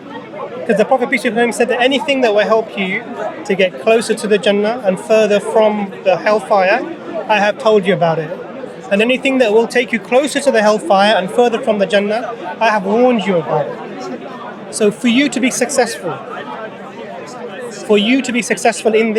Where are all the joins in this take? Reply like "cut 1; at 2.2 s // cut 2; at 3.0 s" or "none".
none